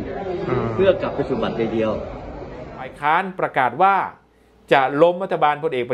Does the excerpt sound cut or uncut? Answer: cut